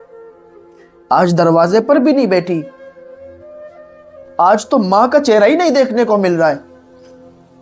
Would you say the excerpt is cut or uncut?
cut